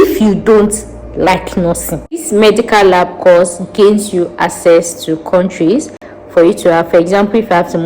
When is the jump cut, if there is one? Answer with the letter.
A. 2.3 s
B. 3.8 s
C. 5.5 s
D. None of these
A